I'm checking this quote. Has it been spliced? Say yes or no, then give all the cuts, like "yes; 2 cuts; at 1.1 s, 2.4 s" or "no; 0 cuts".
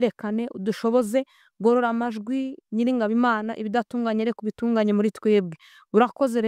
no; 0 cuts